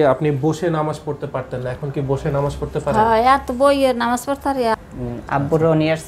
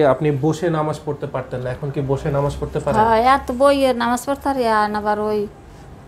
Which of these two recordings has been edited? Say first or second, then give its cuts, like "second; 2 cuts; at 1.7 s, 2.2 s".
first; 1 cut; at 4.8 s